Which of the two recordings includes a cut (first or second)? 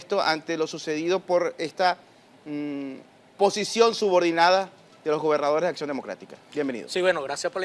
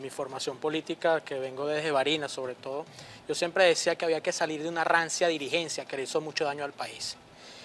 second